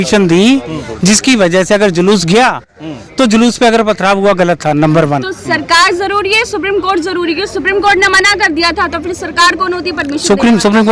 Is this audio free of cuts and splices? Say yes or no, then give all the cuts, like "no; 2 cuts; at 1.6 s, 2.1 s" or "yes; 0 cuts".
yes; 0 cuts